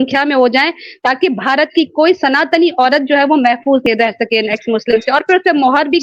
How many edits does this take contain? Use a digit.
1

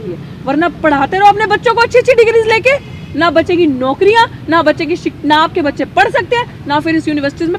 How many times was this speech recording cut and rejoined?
0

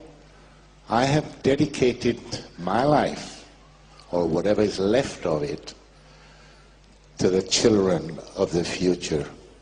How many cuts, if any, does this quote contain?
1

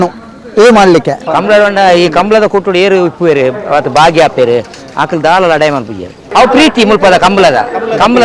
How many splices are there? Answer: 1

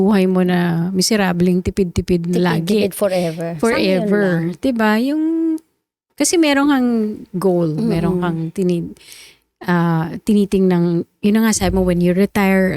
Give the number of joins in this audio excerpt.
0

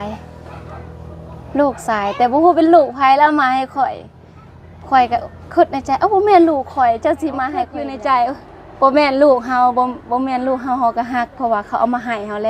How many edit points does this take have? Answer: 1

